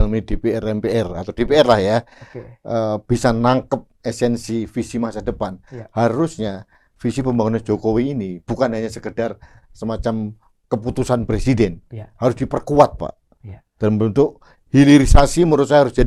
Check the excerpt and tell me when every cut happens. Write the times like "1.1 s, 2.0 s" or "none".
none